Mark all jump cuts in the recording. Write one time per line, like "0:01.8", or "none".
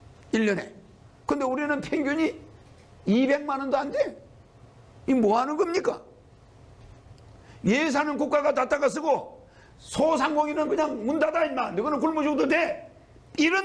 none

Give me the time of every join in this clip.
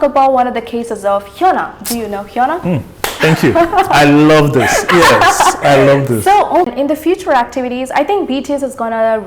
0:06.7

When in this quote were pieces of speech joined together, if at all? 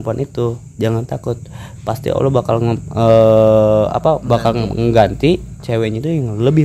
none

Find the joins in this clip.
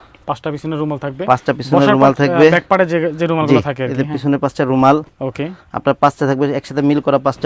none

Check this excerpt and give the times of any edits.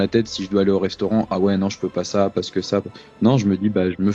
none

